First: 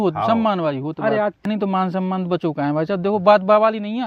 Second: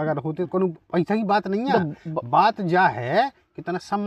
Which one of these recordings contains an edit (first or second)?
first